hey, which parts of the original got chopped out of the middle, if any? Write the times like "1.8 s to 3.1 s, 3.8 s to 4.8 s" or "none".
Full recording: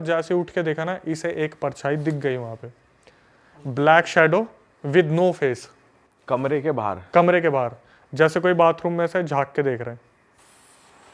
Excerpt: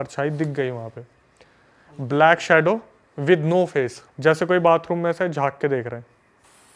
5.7 s to 8.0 s